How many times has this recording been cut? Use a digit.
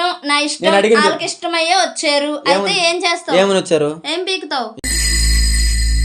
1